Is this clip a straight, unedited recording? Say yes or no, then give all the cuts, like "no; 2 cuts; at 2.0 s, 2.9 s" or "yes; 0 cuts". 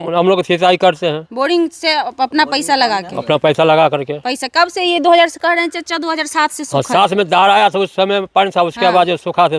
yes; 0 cuts